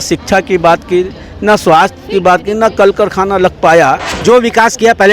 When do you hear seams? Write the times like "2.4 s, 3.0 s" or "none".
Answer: 4.1 s